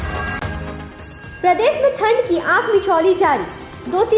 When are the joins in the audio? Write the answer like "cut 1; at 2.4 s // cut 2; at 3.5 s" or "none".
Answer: cut 1; at 0.9 s